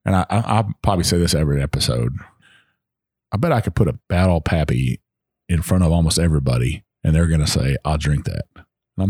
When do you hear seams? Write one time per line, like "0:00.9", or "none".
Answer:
0:02.3
0:04.0

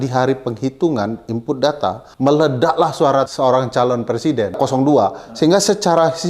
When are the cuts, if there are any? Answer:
0:02.0
0:03.3
0:04.6

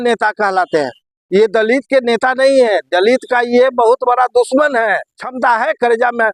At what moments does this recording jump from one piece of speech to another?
0:05.3

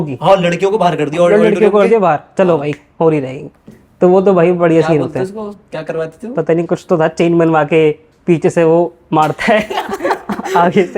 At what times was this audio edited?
none

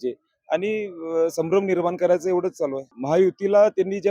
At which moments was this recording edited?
0:02.9

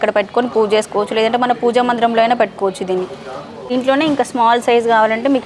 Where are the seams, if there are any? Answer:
0:03.7

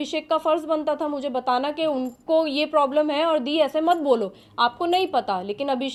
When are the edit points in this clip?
none

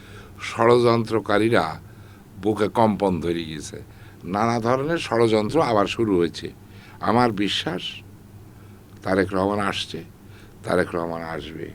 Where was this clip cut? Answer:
none

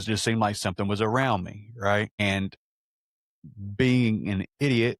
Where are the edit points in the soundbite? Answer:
0:02.2

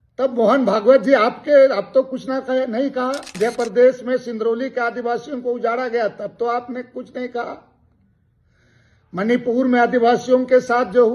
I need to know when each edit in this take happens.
0:03.3

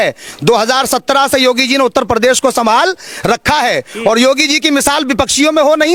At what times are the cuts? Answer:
none

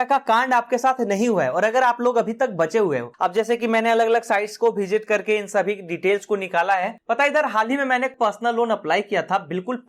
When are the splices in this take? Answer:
0:03.1
0:07.0
0:08.1

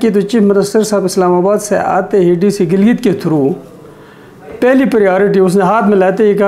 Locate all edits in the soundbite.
none

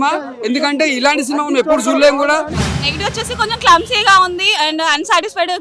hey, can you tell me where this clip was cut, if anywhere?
0:02.6

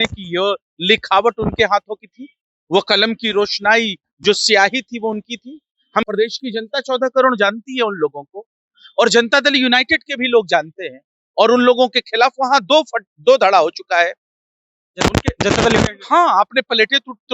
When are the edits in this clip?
0:06.1

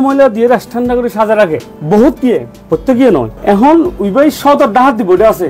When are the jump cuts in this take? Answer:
none

